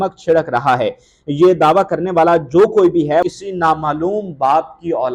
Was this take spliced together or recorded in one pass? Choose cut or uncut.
cut